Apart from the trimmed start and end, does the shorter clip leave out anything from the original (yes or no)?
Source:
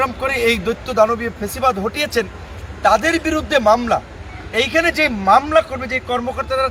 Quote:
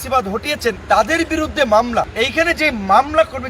yes